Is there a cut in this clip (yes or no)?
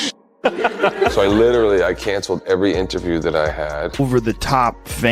yes